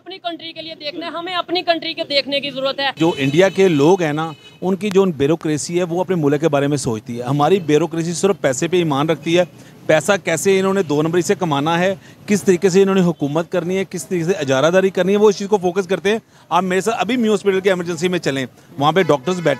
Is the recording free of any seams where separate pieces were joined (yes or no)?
no